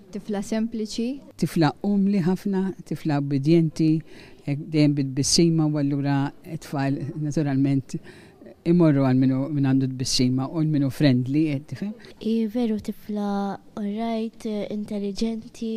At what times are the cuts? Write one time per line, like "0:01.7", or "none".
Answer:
0:01.6